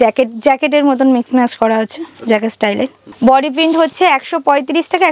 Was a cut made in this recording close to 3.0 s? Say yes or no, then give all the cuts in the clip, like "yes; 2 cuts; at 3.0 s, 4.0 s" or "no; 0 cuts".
yes; 1 cut; at 3.0 s